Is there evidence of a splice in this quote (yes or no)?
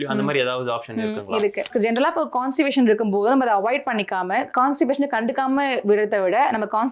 yes